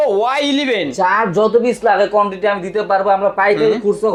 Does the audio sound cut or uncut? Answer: uncut